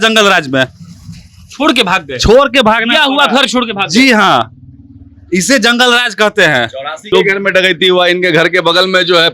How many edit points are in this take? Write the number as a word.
one